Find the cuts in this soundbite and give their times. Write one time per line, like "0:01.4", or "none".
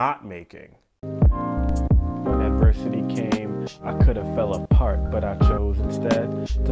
0:01.0